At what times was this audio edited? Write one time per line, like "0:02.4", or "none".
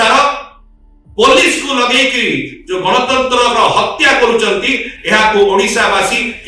none